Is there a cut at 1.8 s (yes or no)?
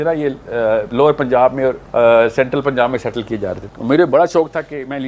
yes